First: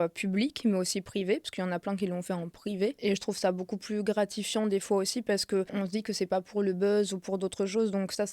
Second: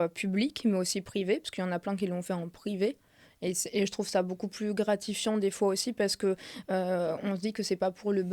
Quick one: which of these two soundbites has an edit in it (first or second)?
first